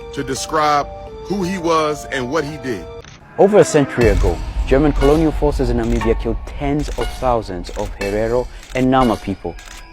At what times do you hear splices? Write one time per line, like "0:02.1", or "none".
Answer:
0:03.0